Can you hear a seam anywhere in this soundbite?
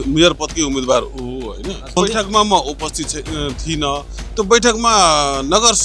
yes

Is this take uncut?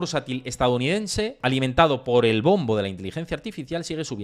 no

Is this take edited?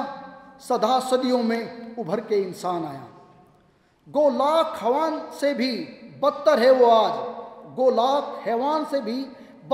no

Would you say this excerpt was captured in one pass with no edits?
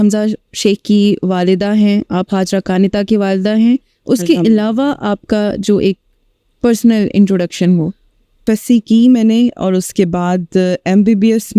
no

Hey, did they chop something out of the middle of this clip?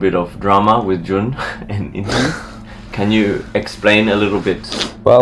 yes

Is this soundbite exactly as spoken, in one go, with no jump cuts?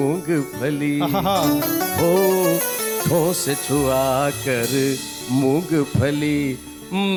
yes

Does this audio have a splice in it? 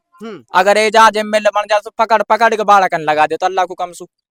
no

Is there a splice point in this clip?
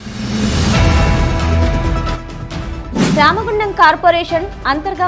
yes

